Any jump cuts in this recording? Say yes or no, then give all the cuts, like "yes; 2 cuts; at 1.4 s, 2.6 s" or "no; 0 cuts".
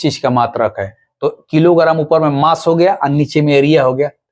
no; 0 cuts